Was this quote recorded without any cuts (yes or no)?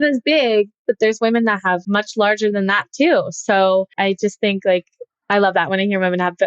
no